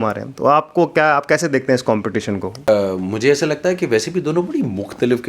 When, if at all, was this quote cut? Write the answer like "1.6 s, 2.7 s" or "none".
2.7 s